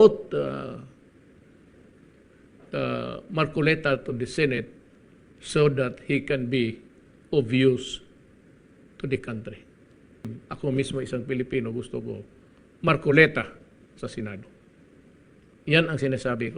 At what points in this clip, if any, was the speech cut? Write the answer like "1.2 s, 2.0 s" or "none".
10.4 s